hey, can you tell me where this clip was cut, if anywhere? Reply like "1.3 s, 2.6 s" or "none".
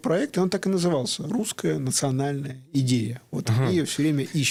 none